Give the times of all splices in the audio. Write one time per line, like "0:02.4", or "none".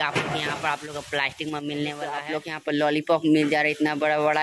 0:02.3